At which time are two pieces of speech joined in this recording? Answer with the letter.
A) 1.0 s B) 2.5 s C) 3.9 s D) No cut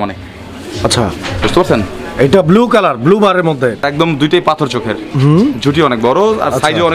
C